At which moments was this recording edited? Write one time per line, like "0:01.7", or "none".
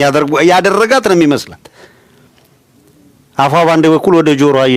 none